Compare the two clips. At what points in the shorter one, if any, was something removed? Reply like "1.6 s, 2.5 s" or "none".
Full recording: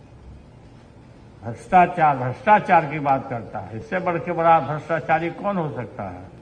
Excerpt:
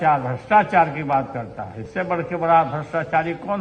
none